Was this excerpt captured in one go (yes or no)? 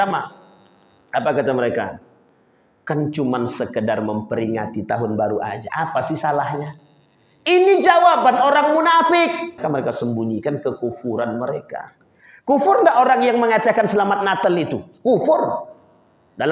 no